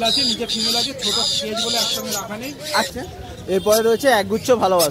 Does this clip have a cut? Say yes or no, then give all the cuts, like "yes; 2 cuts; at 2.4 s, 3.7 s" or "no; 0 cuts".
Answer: yes; 1 cut; at 2.9 s